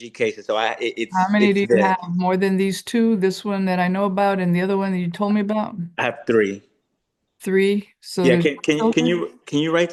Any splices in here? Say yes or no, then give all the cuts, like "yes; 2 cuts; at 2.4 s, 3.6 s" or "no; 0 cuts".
no; 0 cuts